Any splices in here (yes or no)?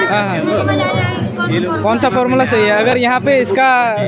yes